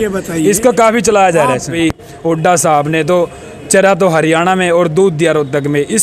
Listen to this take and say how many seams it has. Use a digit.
1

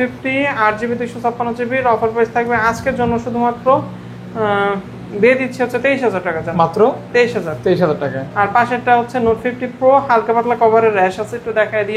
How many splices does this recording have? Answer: 0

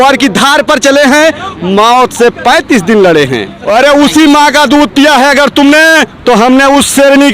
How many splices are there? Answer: 1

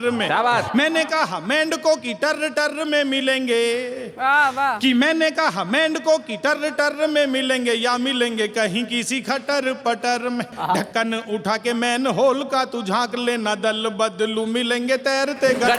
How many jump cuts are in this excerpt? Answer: 0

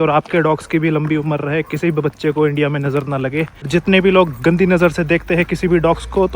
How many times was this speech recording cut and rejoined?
1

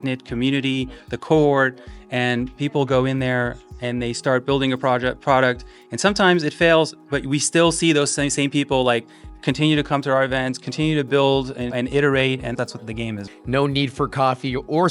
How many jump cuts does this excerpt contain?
1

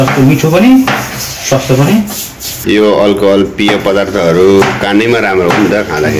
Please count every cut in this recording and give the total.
1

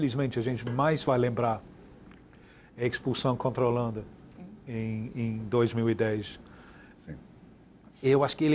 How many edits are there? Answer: 0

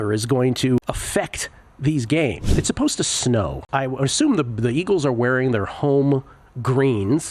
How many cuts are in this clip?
3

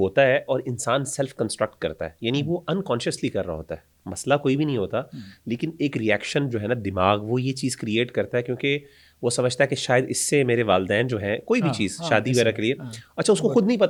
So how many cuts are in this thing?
0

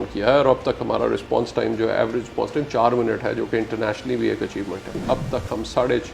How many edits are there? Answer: 1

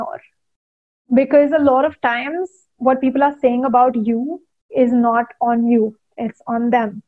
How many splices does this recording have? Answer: 0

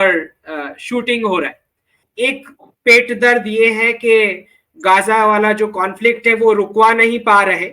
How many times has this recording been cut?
1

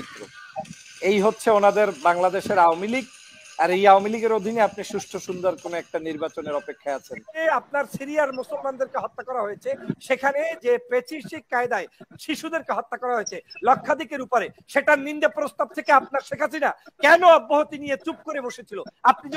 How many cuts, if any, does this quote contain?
1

